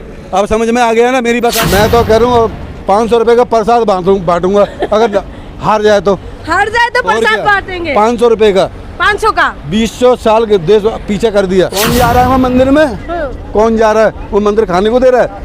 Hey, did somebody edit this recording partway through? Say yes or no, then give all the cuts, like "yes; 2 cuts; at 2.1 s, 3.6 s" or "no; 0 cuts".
yes; 2 cuts; at 1.6 s, 11.9 s